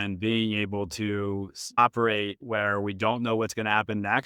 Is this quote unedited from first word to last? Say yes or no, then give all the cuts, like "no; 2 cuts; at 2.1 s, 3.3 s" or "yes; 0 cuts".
no; 1 cut; at 1.8 s